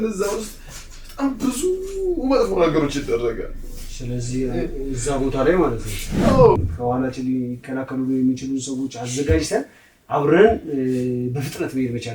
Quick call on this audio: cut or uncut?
cut